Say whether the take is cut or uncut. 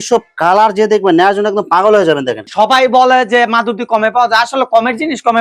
cut